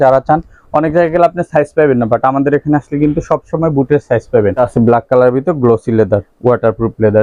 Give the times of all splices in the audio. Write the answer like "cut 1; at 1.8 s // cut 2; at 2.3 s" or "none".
cut 1; at 4.6 s